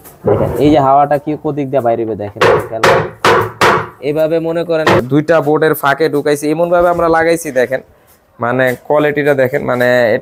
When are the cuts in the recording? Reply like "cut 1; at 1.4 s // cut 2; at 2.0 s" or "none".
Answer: cut 1; at 5.0 s

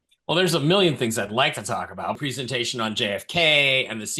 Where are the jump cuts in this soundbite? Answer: cut 1; at 2.2 s

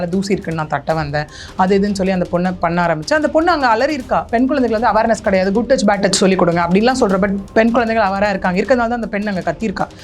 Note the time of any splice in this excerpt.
cut 1; at 4.3 s

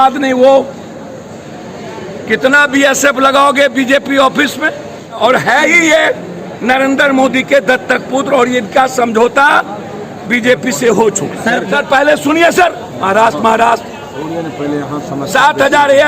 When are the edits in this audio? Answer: cut 1; at 5.2 s // cut 2; at 11.7 s

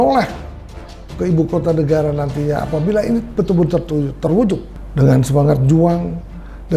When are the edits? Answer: cut 1; at 4.8 s

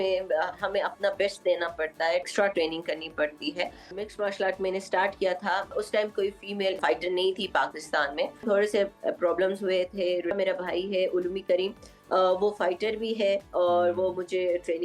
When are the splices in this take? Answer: cut 1; at 2.3 s // cut 2; at 3.9 s // cut 3; at 5.7 s // cut 4; at 6.8 s // cut 5; at 8.4 s // cut 6; at 10.3 s

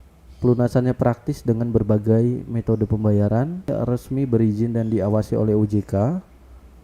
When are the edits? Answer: cut 1; at 3.7 s

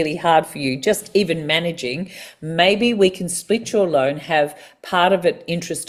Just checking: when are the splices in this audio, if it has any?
none

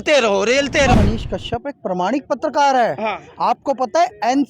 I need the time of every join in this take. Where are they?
cut 1; at 0.9 s

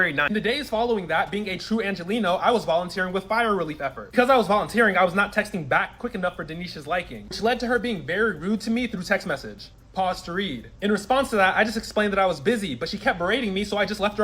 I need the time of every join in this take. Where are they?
cut 1; at 10.5 s

